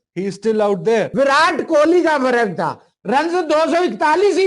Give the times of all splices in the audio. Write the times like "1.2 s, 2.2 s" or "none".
1.1 s